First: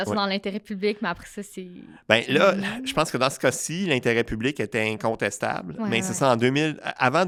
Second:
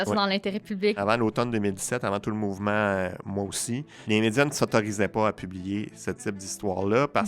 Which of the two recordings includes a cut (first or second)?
second